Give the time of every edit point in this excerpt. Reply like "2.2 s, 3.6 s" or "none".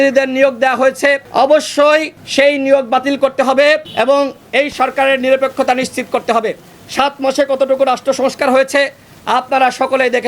1.2 s, 2.2 s, 3.9 s

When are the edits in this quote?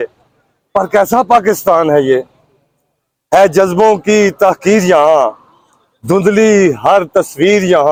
none

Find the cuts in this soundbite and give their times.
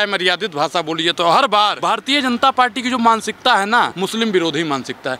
1.8 s, 3.9 s

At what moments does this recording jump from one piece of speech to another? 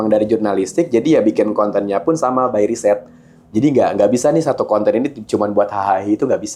none

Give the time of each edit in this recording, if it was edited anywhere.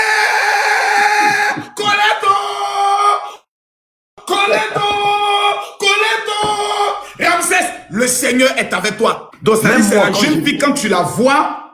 9.3 s

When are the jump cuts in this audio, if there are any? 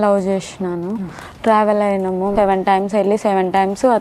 2.3 s

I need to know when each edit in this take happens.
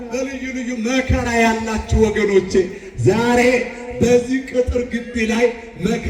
none

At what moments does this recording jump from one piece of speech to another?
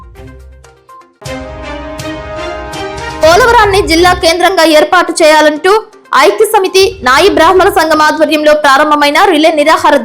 1.1 s, 3.2 s

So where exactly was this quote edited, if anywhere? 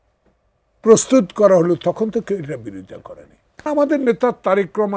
3.6 s

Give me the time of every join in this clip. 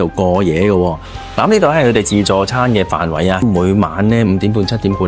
1.0 s

